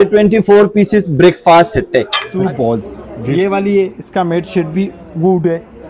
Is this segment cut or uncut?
cut